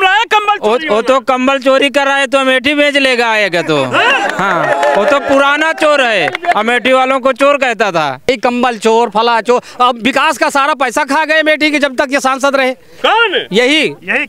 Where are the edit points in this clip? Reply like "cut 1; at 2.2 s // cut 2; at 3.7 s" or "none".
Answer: cut 1; at 8.3 s

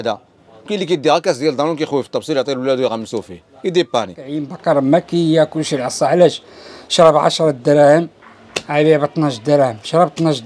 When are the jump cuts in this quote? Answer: cut 1; at 4.4 s

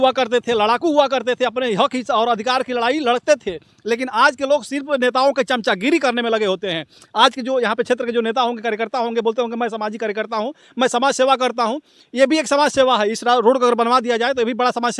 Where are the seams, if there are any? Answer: none

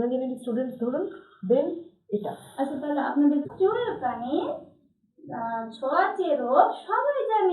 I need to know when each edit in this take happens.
cut 1; at 3.5 s

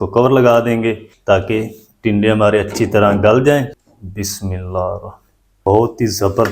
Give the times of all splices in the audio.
cut 1; at 1.1 s // cut 2; at 3.7 s // cut 3; at 5.5 s

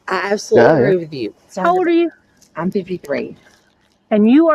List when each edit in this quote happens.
cut 1; at 1.5 s

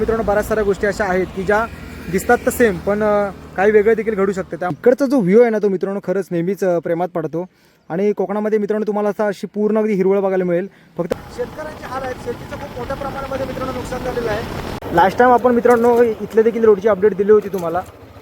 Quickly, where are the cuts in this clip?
cut 1; at 4.8 s // cut 2; at 11.1 s // cut 3; at 14.7 s

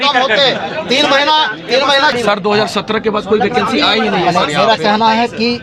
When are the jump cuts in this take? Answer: cut 1; at 2.1 s

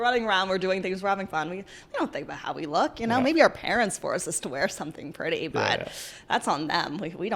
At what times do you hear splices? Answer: none

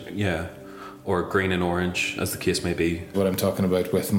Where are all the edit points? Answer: cut 1; at 3.1 s

